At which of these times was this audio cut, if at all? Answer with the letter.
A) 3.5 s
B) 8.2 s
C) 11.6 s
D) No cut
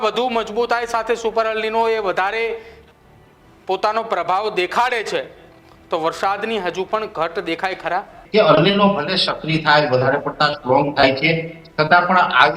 B